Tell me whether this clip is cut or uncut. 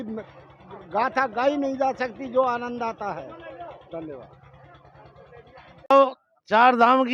cut